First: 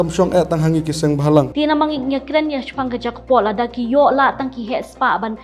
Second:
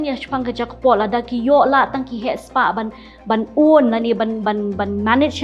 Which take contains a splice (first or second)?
first